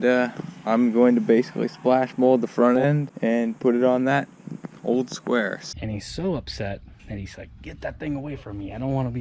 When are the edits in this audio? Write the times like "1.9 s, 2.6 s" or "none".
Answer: 3.1 s, 5.6 s

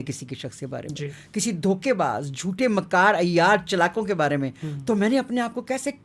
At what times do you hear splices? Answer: none

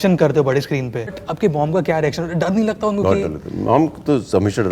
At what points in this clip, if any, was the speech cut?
1.2 s

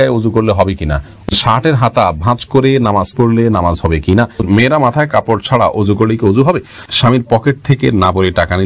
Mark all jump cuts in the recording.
1.3 s, 4.4 s, 6.8 s

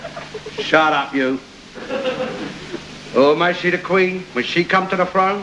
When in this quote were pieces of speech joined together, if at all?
2.1 s

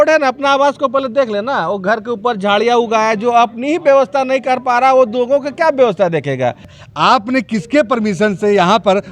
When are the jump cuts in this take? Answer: 6.8 s

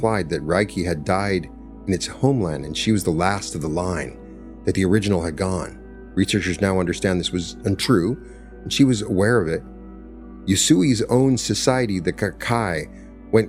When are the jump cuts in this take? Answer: none

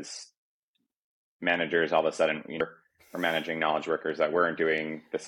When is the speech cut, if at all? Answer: 2.6 s

